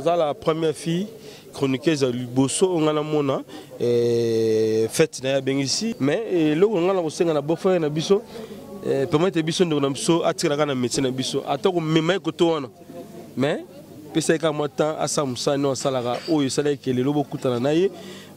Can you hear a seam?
yes; 1 cut; at 5.9 s

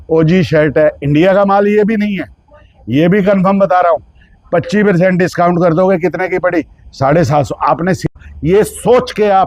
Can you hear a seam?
yes; 1 cut; at 8.1 s

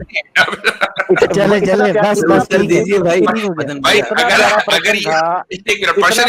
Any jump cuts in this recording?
no; 0 cuts

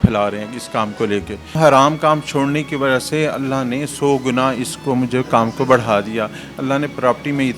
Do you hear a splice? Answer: yes; 1 cut; at 1.6 s

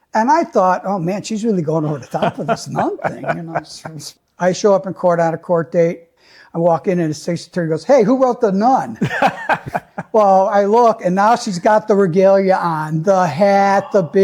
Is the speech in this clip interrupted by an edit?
yes; 2 cuts; at 4.0 s, 6.1 s

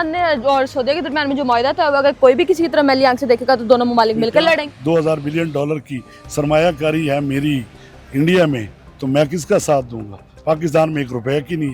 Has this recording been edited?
yes; 1 cut; at 4.7 s

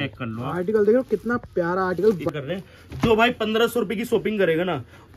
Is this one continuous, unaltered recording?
no; 1 cut; at 2.3 s

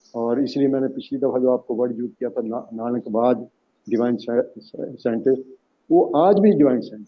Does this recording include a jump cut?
no; 0 cuts

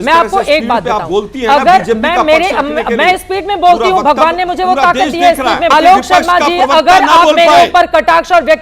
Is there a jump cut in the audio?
yes; 1 cut; at 5.7 s

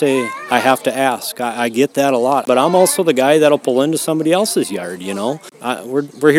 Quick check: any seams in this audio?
yes; 2 cuts; at 2.5 s, 5.5 s

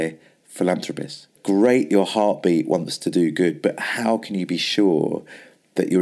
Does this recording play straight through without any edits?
no; 1 cut; at 1.3 s

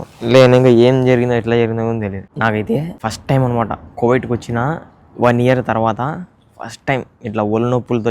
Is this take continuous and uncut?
no; 2 cuts; at 2.2 s, 2.9 s

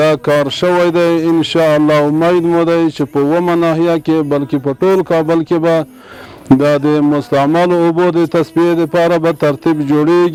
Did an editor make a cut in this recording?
no; 0 cuts

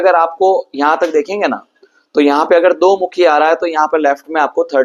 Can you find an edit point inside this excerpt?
no; 0 cuts

